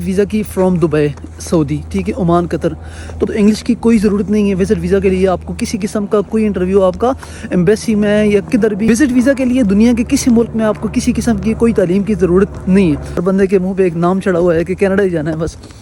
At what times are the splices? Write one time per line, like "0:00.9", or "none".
0:03.3
0:08.9
0:13.1